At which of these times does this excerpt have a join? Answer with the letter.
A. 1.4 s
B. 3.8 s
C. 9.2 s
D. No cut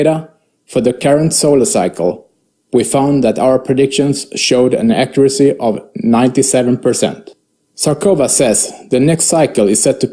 D